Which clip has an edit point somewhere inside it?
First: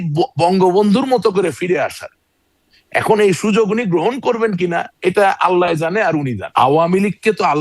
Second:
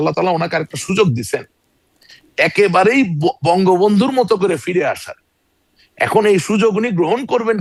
first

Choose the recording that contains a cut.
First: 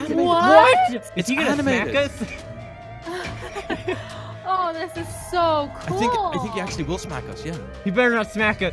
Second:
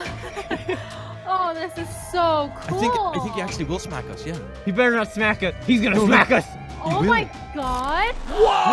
first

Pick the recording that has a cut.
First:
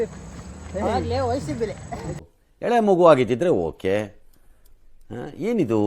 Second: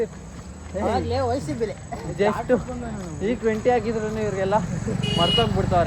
first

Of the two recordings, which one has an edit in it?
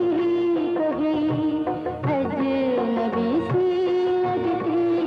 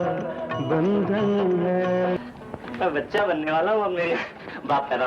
second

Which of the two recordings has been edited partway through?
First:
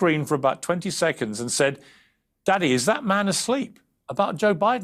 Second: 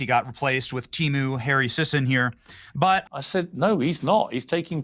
second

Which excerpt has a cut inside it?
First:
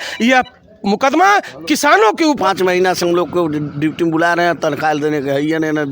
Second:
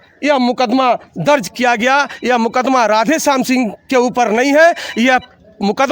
first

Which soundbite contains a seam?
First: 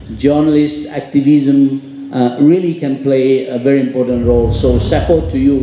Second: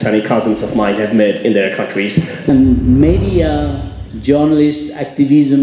second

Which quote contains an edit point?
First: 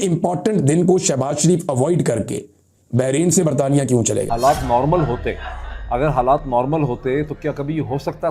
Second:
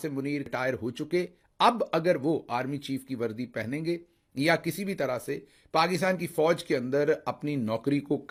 first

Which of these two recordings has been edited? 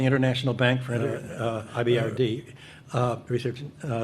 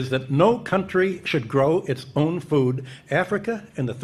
first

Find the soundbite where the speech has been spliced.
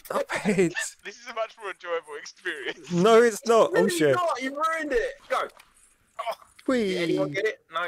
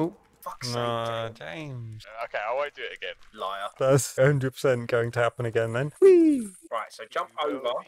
first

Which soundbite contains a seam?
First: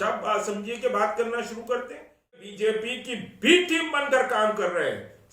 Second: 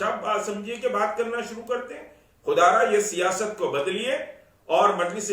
first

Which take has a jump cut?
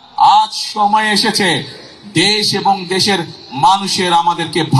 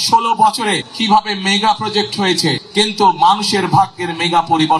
second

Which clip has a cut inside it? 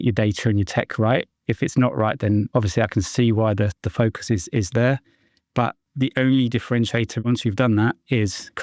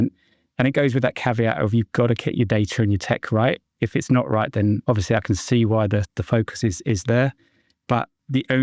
first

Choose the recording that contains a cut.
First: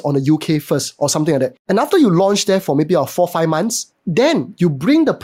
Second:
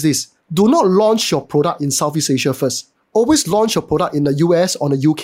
first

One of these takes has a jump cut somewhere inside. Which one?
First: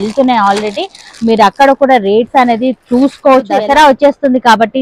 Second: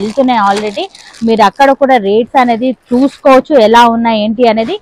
first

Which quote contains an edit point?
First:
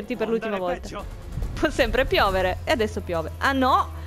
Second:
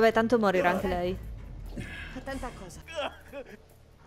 second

